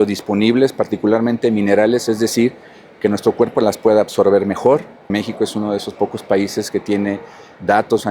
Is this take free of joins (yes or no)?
no